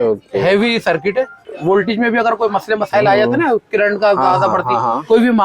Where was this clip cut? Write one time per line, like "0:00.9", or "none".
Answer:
0:01.4

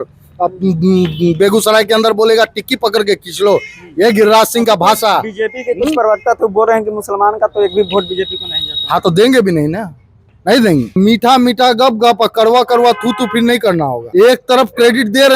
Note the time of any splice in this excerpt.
0:11.0
0:14.0

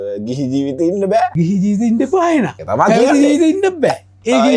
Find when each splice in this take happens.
0:01.3
0:02.6

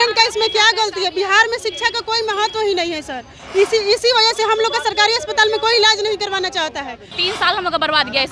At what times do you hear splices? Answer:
0:07.1

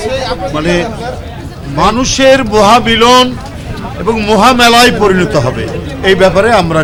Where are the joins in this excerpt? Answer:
none

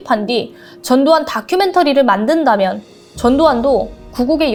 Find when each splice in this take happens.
none

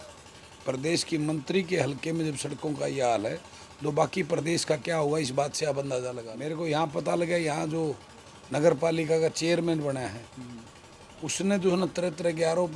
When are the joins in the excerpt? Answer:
0:06.3

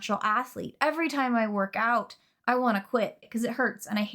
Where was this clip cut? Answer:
0:03.2

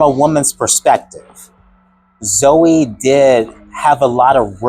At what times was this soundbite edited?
0:01.9

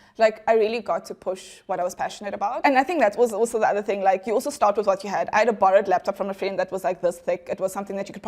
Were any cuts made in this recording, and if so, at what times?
0:02.6

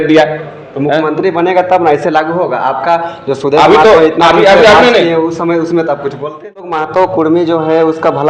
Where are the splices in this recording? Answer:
0:06.8

